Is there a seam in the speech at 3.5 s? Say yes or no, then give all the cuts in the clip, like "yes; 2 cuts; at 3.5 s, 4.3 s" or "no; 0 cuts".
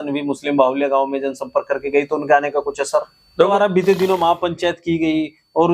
yes; 1 cut; at 3.5 s